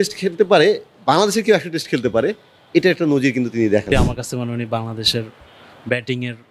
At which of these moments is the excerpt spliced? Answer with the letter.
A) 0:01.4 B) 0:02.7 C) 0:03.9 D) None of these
C